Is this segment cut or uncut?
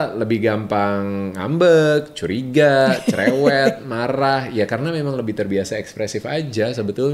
uncut